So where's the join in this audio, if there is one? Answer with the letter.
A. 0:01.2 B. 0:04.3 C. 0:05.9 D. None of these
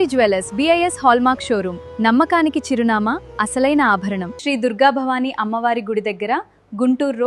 B